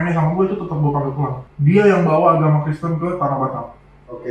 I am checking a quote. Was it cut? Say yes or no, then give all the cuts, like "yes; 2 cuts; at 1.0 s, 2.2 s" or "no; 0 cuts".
yes; 1 cut; at 1.4 s